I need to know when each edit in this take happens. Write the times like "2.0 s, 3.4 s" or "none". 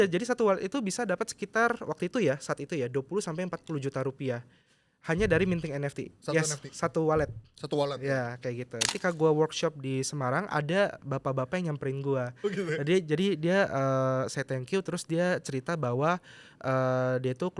8.9 s